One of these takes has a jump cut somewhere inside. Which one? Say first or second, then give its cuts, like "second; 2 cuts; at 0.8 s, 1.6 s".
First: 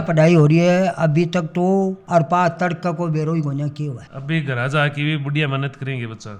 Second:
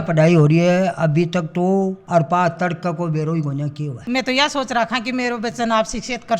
second; 1 cut; at 4.0 s